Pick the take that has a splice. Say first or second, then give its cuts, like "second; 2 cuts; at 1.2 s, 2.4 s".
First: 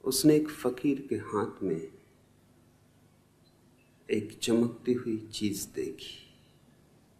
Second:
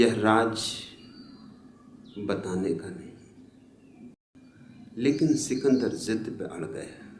second; 1 cut; at 4.2 s